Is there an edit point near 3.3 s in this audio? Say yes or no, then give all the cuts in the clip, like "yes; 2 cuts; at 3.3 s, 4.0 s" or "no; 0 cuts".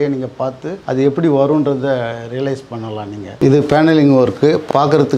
yes; 1 cut; at 3.3 s